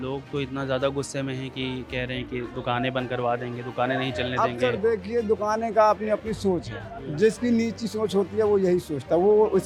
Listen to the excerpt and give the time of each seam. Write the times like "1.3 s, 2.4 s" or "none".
none